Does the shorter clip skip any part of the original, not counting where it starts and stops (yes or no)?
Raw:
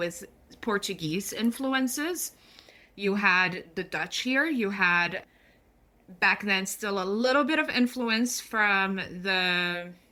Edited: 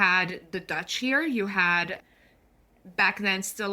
no